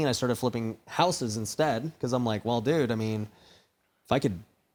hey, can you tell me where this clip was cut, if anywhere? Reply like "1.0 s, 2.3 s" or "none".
none